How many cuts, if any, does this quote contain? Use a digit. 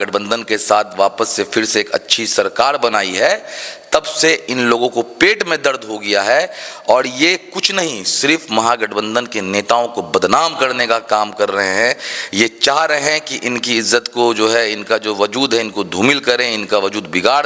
0